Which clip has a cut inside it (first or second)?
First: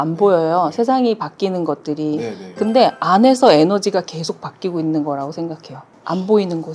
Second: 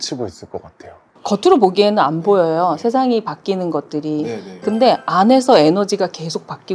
second